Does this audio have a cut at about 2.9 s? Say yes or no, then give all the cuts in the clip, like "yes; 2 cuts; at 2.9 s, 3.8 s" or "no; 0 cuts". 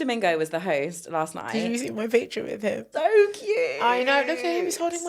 yes; 1 cut; at 2.9 s